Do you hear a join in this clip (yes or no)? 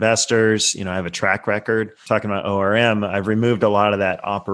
yes